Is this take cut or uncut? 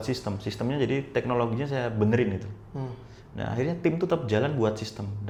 uncut